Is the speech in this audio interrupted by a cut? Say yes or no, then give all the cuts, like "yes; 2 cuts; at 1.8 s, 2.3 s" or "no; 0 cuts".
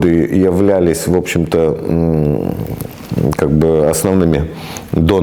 no; 0 cuts